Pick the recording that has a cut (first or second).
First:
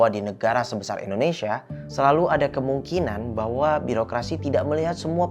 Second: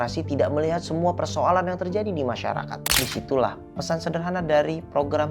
second